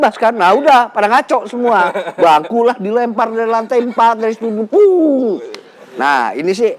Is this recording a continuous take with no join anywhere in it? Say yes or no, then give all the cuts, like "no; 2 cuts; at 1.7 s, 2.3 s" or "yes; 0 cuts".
no; 1 cut; at 5.8 s